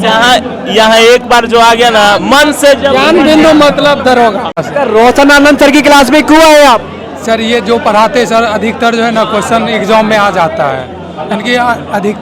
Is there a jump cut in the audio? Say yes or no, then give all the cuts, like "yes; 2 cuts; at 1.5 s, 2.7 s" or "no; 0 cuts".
yes; 1 cut; at 4.6 s